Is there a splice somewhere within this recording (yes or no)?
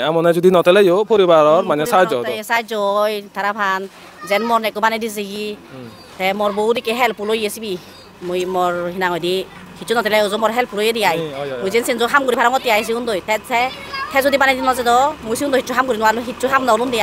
no